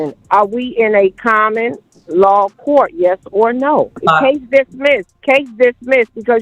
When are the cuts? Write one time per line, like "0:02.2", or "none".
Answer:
0:04.0
0:05.1